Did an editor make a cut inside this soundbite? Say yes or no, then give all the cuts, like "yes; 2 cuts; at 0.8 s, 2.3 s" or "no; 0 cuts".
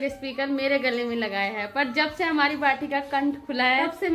no; 0 cuts